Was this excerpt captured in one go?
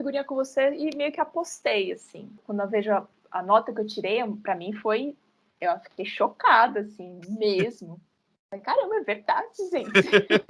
no; 1 cut; at 2.4 s

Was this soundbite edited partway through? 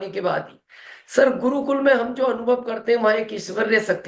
no; 0 cuts

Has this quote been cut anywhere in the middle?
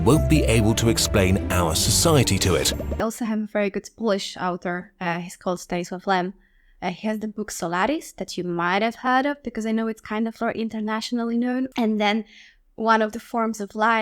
yes; 1 cut; at 2.8 s

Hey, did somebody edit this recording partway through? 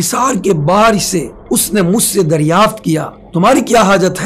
yes; 2 cuts; at 1.3 s, 3.2 s

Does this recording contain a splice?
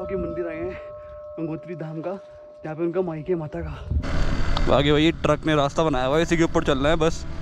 yes; 1 cut; at 4.0 s

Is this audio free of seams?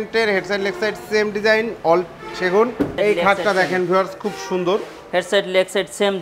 no; 1 cut; at 2.9 s

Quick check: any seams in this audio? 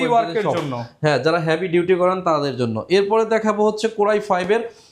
no; 0 cuts

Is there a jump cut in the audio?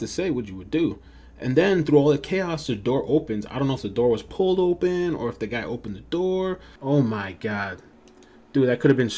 yes; 1 cut; at 6.7 s

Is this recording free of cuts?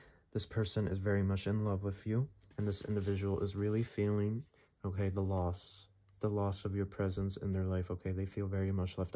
no; 1 cut; at 2.4 s

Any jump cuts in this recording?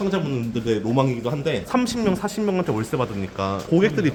no; 0 cuts

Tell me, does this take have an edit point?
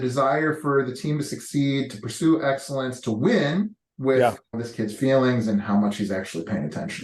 yes; 2 cuts; at 3.8 s, 4.5 s

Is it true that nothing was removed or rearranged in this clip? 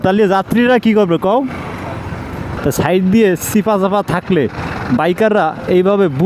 no; 1 cut; at 2.5 s

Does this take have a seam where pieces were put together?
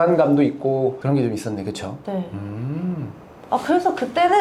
no; 0 cuts

